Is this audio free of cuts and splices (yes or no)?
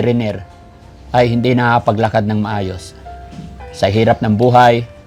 yes